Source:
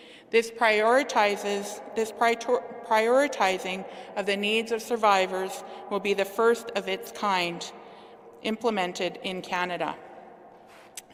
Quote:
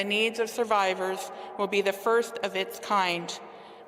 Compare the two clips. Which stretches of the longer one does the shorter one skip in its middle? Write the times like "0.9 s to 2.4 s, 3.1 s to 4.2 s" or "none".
none